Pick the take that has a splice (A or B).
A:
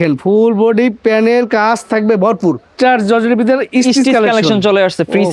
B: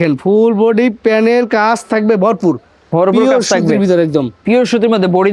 A